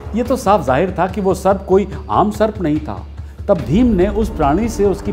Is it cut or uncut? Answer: uncut